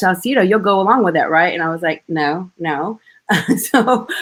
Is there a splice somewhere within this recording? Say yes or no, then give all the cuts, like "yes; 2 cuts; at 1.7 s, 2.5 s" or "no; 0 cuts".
no; 0 cuts